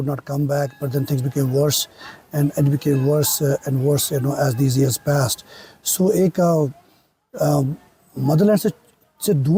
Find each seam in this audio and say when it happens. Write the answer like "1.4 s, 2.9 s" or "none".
none